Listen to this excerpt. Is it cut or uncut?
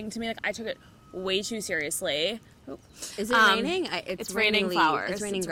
uncut